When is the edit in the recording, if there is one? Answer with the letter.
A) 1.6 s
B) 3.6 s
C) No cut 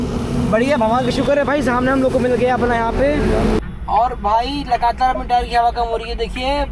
B